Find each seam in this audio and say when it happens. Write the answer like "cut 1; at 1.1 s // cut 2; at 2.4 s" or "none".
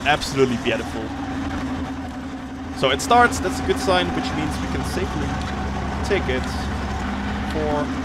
none